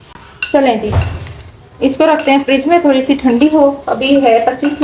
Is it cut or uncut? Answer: uncut